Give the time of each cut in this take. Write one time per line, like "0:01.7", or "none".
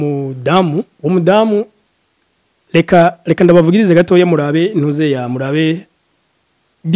0:00.9